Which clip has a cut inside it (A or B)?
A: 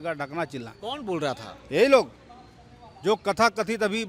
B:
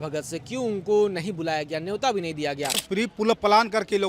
B